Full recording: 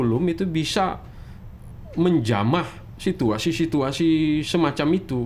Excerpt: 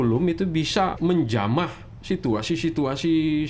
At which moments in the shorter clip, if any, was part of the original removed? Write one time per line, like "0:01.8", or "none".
0:01.0